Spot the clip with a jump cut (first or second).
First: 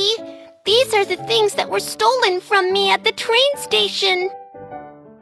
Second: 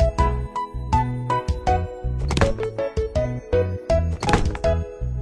first